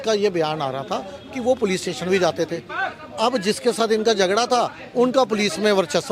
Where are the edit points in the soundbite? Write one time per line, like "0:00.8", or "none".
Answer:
none